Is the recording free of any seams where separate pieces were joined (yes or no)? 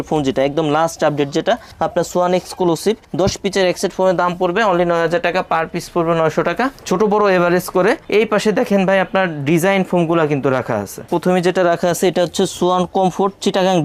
yes